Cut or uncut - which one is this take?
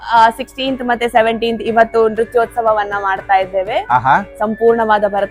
uncut